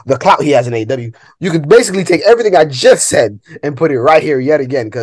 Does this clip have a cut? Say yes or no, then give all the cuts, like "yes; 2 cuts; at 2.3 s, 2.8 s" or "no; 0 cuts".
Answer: no; 0 cuts